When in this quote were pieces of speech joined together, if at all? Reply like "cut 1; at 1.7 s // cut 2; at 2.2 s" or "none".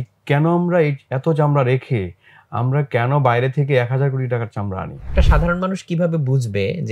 cut 1; at 5.1 s